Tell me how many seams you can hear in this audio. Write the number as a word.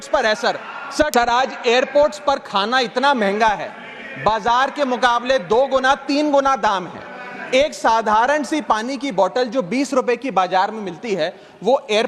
one